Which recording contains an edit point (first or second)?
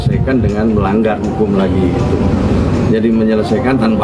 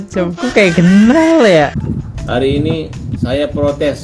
second